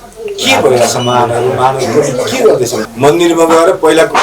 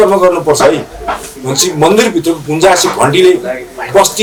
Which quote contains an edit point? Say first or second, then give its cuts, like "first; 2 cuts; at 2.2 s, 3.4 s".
first; 1 cut; at 2.9 s